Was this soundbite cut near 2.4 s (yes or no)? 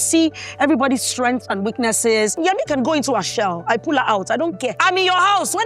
yes